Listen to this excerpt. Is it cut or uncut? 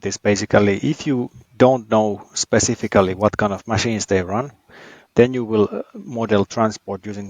cut